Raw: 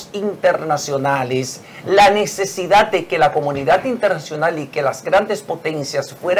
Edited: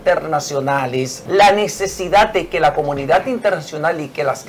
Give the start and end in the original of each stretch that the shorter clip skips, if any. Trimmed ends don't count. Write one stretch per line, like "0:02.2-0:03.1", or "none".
0:01.5-0:01.7